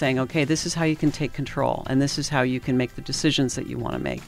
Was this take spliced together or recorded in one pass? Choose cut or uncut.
uncut